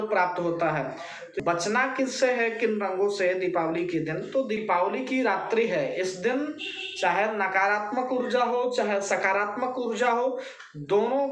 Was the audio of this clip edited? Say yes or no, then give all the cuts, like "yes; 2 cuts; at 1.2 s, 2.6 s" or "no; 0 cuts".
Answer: yes; 2 cuts; at 1.3 s, 4.6 s